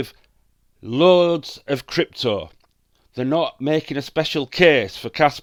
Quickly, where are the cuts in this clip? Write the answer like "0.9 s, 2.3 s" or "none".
none